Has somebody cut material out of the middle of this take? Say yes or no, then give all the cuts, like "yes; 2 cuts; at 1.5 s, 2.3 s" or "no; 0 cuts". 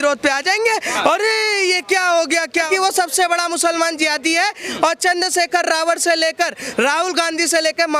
yes; 2 cuts; at 2.7 s, 4.6 s